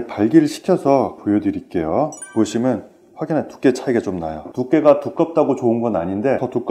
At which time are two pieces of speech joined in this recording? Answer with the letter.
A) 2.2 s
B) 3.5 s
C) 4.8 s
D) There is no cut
D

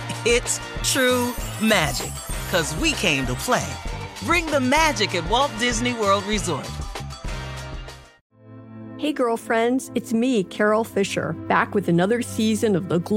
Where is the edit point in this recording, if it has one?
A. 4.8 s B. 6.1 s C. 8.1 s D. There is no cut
C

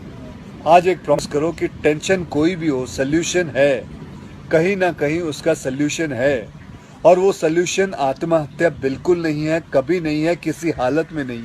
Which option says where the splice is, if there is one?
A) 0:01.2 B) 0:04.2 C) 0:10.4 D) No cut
A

